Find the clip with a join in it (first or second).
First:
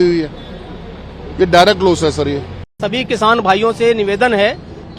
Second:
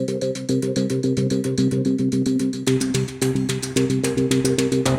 first